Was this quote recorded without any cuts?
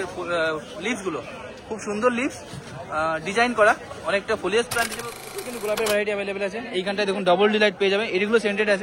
no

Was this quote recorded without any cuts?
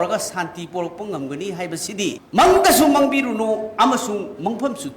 no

